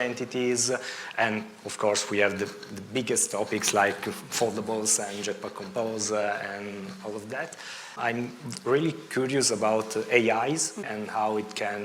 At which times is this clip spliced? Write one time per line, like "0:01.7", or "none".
0:07.9
0:10.9